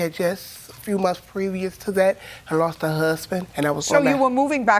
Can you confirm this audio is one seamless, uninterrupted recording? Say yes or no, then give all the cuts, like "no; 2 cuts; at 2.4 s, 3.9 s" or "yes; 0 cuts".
no; 1 cut; at 3.8 s